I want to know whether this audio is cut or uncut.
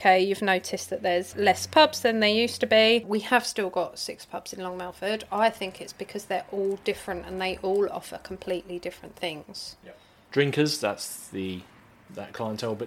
cut